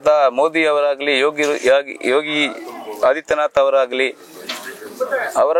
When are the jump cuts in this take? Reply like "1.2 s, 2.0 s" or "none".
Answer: none